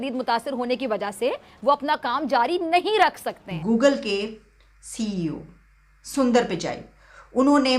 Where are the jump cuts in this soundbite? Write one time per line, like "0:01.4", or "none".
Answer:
0:03.5